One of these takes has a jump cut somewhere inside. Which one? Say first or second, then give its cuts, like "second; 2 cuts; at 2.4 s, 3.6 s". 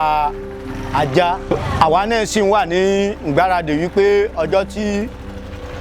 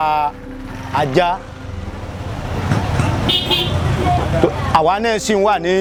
first; 1 cut; at 1.5 s